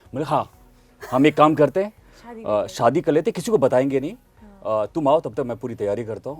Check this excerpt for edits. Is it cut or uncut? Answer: uncut